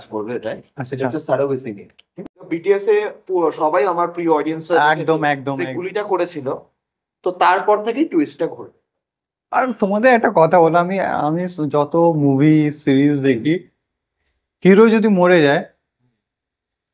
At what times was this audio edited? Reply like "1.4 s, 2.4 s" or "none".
2.4 s